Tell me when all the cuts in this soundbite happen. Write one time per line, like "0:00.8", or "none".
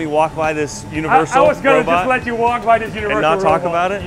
none